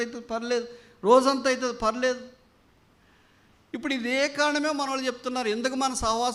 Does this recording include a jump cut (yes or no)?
no